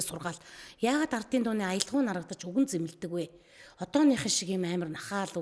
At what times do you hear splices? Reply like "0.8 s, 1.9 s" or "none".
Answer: none